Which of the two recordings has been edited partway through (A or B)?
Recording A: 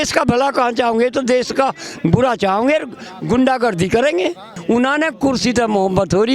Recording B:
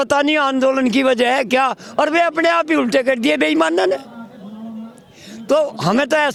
A